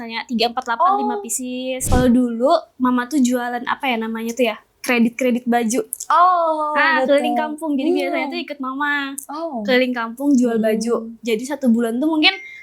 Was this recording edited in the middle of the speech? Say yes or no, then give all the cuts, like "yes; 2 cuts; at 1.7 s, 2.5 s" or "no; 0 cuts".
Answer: yes; 1 cut; at 1.9 s